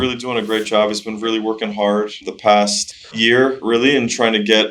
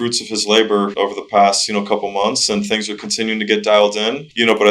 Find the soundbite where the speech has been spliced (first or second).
first